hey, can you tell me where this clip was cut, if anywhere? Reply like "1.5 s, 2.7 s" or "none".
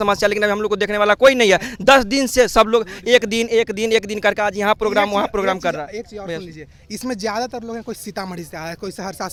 none